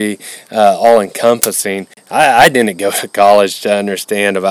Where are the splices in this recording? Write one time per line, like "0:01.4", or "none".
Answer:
0:02.0

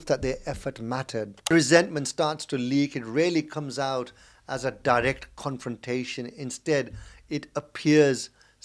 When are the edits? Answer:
0:01.5

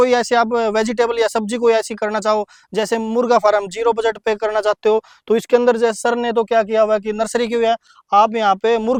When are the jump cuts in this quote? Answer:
none

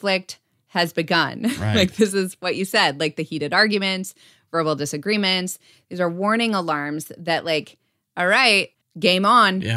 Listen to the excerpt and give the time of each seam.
0:08.7

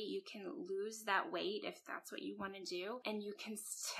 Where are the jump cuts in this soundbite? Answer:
0:03.0

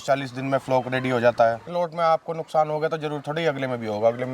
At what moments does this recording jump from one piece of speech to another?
0:01.7

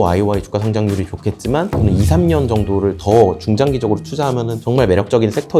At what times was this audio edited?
0:01.7
0:04.6

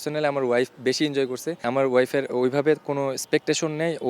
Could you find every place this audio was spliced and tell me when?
0:01.6

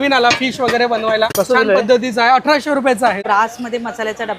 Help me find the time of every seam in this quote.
0:01.3
0:03.2

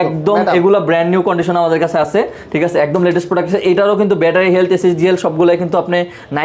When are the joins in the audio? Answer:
none

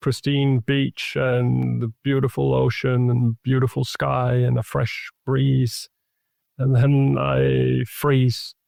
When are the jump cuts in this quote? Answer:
none

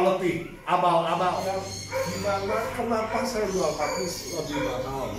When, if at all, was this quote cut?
0:01.4

